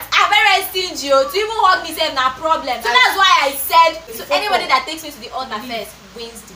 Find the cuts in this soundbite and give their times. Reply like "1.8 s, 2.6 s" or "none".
4.1 s